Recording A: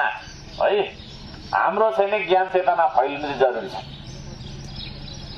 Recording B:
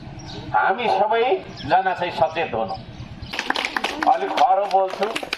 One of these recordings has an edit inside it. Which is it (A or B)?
B